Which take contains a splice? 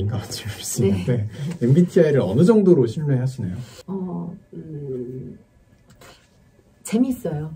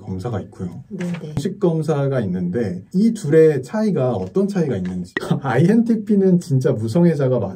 second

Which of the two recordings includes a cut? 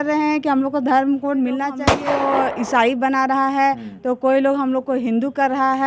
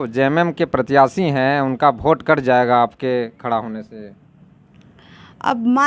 first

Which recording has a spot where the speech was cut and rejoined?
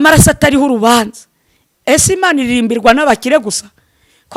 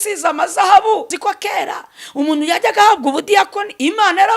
second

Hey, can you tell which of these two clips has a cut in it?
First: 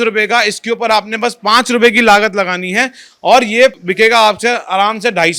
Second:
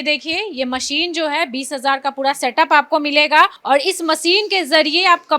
second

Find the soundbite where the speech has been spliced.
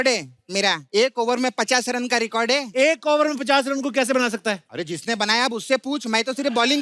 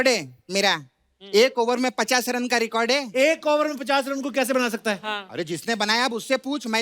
first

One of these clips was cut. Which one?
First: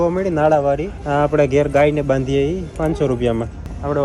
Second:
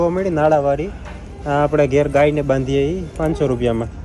first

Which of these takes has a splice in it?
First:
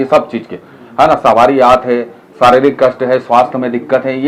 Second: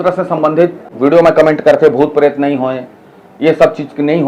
second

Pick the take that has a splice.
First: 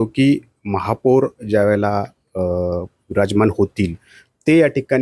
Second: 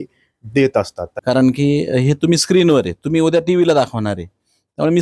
second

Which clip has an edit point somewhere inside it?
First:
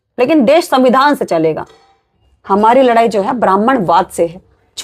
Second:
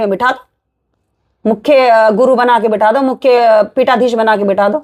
first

